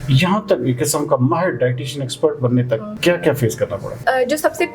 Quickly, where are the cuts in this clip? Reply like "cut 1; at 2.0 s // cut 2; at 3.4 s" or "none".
cut 1; at 2.9 s // cut 2; at 4.0 s